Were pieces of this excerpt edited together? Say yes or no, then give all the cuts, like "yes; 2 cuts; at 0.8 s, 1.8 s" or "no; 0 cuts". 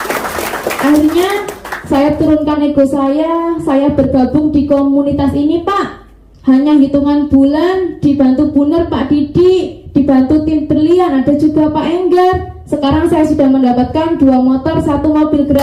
no; 0 cuts